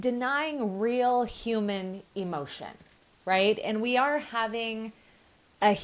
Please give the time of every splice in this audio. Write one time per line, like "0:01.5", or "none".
none

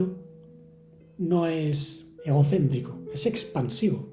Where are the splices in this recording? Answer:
0:03.1

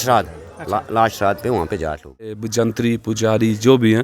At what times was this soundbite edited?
0:02.4

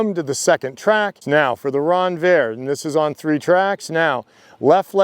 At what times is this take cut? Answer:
0:01.2

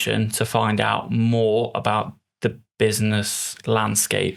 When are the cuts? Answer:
none

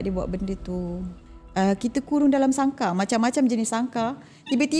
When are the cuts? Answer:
0:01.2

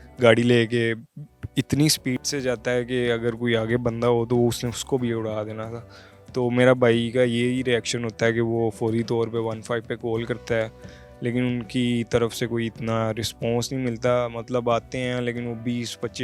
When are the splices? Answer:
none

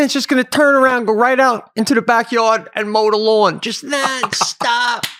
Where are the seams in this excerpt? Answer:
none

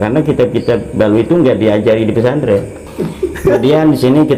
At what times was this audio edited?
0:02.9

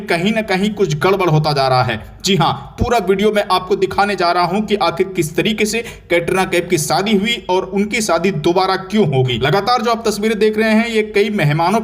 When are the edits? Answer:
0:09.4

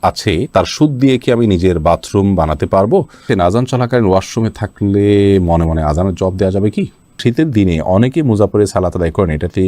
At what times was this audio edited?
0:03.2
0:07.1

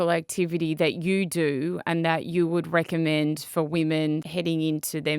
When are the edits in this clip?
0:04.3

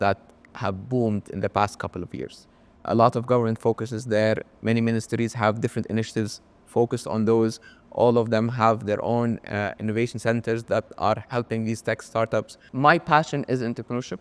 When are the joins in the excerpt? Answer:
0:12.6

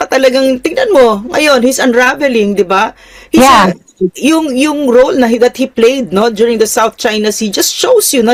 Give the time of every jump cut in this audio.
none

